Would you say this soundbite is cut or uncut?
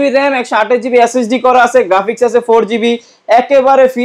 uncut